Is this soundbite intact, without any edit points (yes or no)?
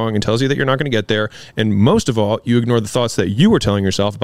yes